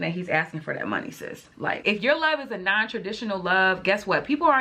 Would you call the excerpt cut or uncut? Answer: cut